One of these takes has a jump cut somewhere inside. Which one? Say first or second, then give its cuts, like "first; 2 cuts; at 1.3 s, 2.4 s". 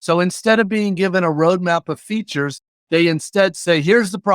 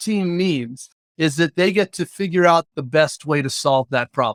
first; 1 cut; at 2.7 s